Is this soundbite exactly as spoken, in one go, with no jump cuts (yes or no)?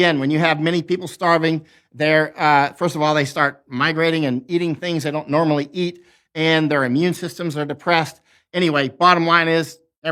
yes